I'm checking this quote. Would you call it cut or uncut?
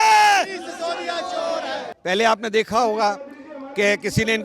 cut